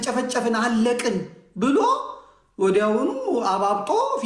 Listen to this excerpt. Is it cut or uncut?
uncut